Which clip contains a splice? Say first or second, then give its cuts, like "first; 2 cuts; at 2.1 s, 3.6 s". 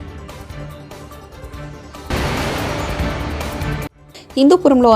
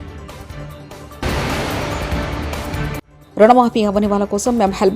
first; 3 cuts; at 1.0 s, 2.1 s, 4.0 s